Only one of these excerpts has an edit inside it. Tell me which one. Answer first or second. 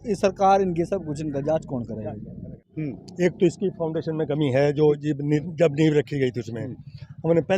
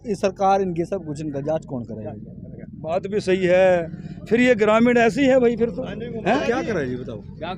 first